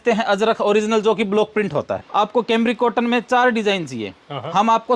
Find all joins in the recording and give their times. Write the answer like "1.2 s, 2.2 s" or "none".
2.0 s